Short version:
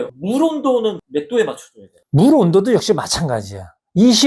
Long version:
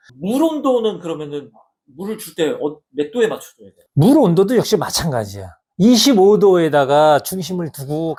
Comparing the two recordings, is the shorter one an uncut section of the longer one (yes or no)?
no